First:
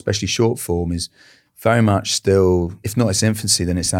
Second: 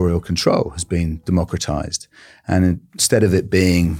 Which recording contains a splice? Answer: first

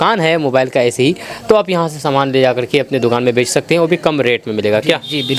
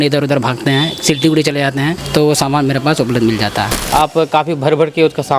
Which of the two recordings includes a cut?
second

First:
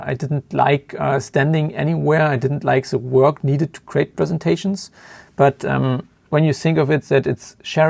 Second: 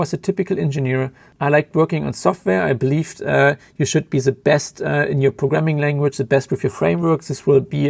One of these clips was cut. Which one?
second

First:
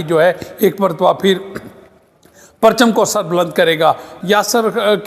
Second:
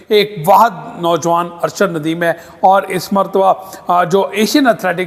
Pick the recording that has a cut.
first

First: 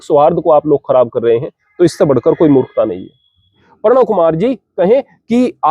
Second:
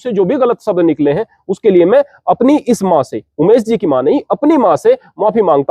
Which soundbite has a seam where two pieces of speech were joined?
first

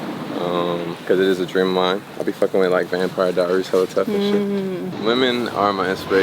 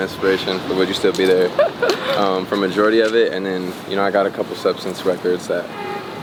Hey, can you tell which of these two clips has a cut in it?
first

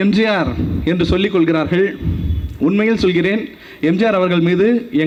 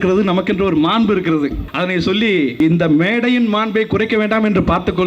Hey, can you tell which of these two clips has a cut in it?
second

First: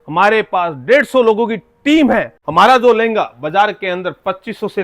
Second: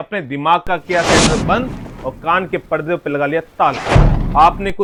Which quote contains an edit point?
first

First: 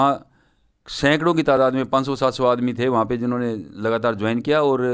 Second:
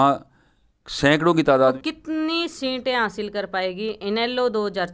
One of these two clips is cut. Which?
second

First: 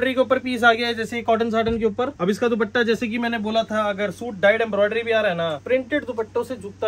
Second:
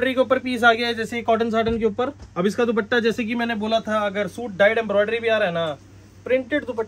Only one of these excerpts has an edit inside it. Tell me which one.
first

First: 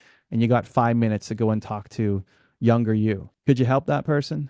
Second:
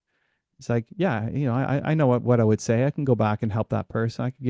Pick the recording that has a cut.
first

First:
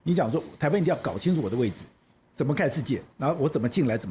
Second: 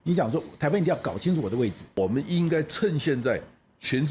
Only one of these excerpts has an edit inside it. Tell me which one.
second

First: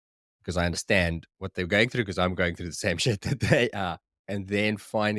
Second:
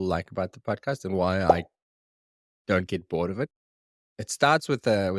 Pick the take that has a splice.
first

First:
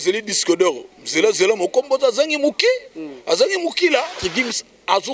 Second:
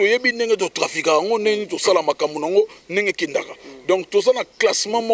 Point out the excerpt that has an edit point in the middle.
first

